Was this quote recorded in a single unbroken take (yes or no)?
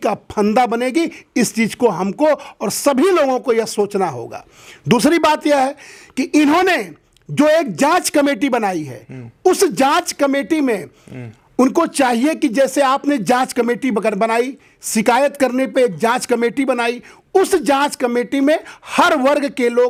yes